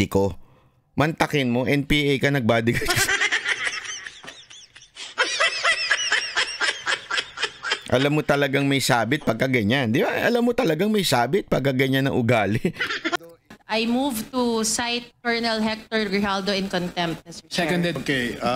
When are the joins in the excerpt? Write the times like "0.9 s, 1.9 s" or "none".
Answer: 13.2 s